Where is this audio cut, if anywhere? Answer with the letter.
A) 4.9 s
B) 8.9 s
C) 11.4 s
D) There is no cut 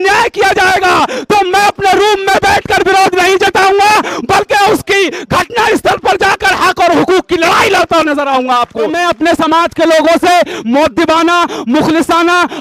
B